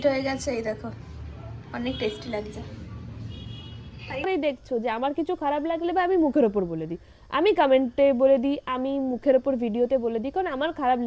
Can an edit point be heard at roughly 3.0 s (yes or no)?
no